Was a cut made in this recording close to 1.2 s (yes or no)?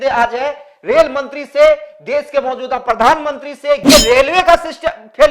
no